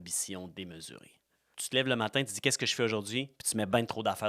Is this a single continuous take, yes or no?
no